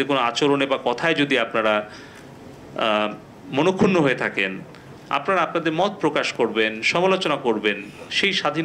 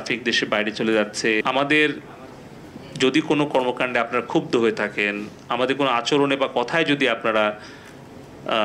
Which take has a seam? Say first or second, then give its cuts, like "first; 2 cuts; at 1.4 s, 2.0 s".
second; 1 cut; at 1.4 s